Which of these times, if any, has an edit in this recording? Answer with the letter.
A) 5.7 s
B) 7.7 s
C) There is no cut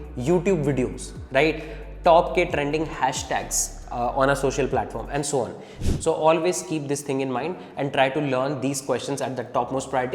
A